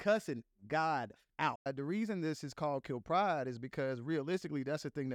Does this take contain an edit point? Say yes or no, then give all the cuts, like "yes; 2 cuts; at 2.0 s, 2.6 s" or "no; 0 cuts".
yes; 1 cut; at 1.7 s